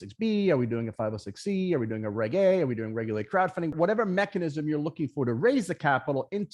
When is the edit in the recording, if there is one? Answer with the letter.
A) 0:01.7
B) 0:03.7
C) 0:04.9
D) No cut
B